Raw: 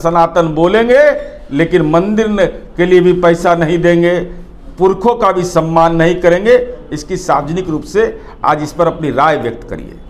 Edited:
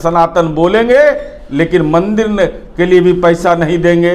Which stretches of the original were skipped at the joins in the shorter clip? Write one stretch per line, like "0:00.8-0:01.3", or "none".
none